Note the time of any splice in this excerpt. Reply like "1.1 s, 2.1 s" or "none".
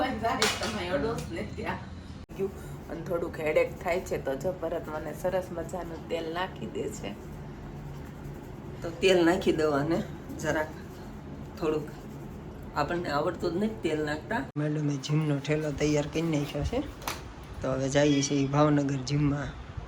2.3 s, 14.6 s